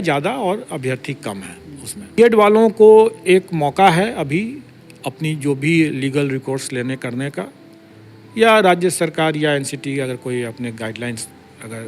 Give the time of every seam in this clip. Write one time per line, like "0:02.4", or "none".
0:02.2